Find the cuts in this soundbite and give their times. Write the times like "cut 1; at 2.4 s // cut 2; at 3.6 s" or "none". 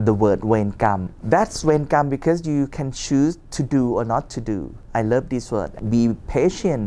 cut 1; at 1.1 s // cut 2; at 4.8 s // cut 3; at 5.8 s